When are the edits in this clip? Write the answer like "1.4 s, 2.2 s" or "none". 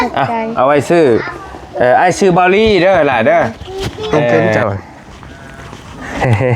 4.6 s